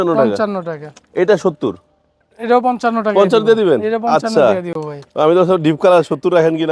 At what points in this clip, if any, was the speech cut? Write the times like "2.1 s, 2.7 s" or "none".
none